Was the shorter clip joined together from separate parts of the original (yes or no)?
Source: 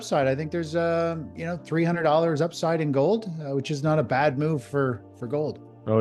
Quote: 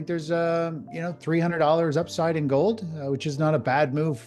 no